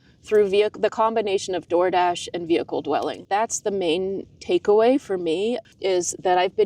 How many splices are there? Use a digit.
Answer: 2